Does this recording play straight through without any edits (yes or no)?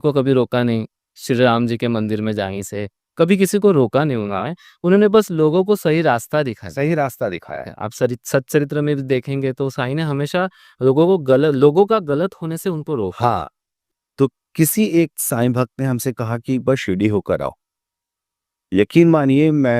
no